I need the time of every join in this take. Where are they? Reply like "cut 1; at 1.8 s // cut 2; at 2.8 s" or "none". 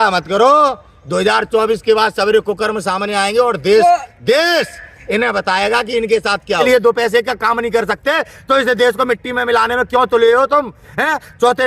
cut 1; at 6.6 s